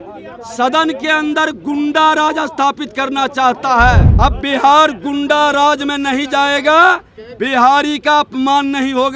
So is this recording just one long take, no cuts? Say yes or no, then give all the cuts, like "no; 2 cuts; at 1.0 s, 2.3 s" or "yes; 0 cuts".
no; 1 cut; at 4.1 s